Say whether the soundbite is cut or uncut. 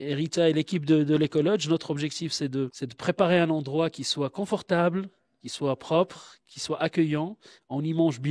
cut